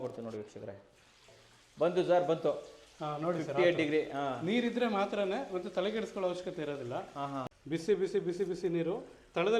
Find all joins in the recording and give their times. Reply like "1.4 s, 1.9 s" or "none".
7.4 s